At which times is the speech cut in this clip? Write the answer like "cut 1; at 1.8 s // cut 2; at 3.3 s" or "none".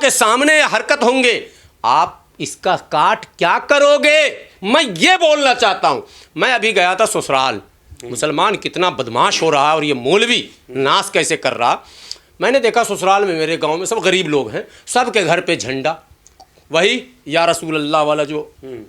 none